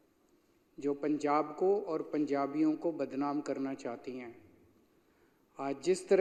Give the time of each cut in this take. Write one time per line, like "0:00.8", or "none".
none